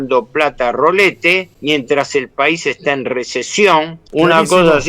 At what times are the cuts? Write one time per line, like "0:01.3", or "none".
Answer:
0:01.5
0:04.0